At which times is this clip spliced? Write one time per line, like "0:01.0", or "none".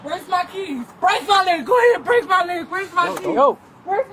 none